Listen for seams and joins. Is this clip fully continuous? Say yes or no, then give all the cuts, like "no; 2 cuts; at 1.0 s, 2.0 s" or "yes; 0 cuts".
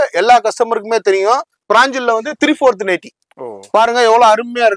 no; 1 cut; at 1.5 s